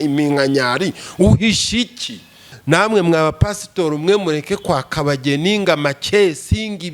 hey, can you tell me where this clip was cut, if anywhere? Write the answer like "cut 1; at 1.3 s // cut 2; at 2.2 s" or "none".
cut 1; at 2.5 s